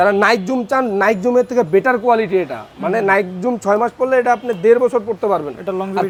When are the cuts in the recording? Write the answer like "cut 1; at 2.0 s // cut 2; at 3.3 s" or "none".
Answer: none